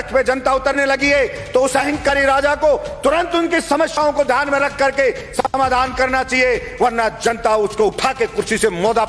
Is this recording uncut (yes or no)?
yes